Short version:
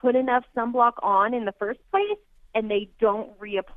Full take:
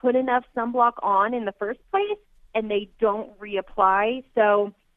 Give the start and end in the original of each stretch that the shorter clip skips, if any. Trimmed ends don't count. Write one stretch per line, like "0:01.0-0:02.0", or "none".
none

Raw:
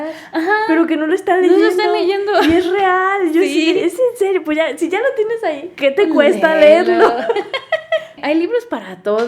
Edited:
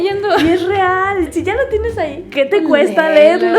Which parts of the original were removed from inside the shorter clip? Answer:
0:03.3-0:04.7

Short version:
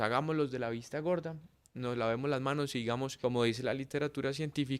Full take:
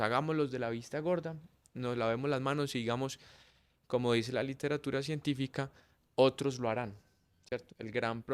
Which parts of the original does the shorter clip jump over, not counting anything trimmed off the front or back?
0:03.1-0:03.8

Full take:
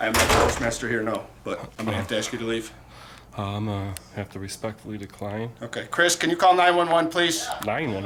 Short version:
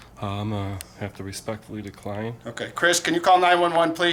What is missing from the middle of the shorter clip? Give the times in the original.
none

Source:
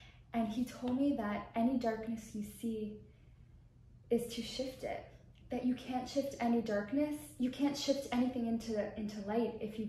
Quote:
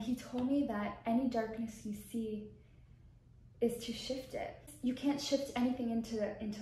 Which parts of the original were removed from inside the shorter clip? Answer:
0:05.2-0:07.2

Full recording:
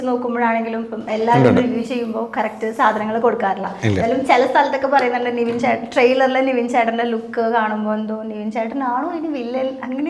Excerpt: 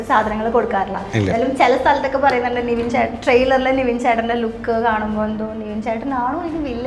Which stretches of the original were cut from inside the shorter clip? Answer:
none

